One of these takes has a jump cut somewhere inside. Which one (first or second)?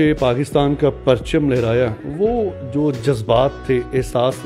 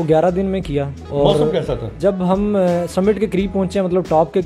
second